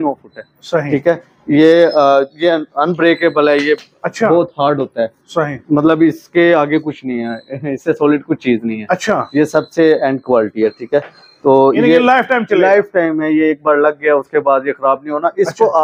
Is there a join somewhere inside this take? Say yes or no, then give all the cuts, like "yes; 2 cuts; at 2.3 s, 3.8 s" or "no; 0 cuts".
no; 0 cuts